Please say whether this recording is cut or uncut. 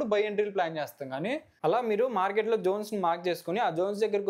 cut